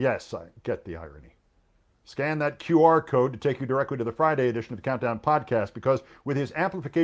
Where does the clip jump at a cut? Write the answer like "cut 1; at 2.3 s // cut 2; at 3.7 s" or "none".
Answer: cut 1; at 1.4 s